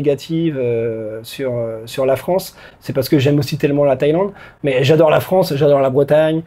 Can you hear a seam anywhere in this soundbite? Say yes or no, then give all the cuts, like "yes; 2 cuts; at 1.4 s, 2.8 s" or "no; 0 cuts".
no; 0 cuts